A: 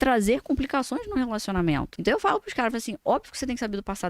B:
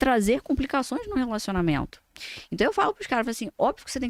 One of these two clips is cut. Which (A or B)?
A